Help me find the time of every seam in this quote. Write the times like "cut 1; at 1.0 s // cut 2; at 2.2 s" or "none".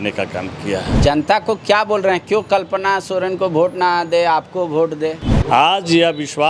cut 1; at 0.9 s // cut 2; at 5.3 s